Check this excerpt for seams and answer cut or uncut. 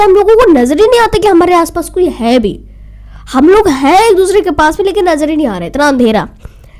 uncut